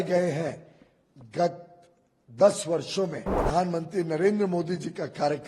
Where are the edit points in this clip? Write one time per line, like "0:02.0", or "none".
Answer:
0:03.4